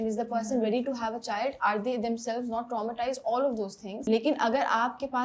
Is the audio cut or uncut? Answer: cut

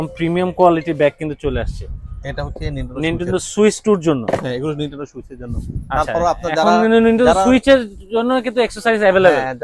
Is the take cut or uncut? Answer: uncut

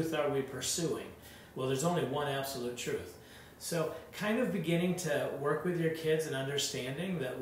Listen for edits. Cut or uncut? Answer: uncut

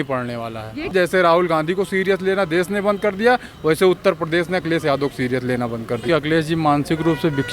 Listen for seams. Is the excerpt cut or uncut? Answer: cut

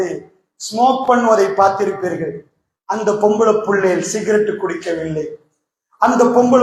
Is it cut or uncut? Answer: uncut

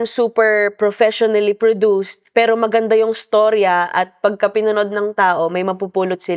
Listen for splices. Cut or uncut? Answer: uncut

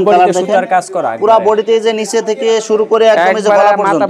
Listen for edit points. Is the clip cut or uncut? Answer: uncut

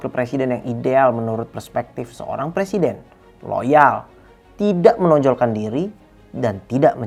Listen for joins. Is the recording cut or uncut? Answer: uncut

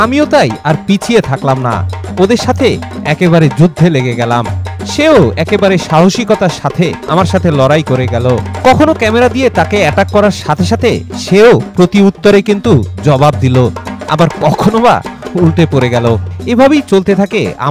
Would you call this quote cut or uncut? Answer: uncut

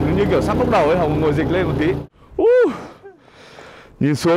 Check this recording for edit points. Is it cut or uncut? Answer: cut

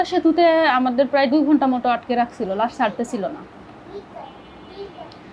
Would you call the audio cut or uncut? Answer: uncut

